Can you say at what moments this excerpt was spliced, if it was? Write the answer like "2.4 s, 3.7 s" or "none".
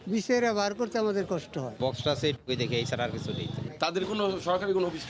1.6 s, 3.6 s